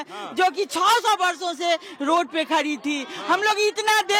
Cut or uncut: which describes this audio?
uncut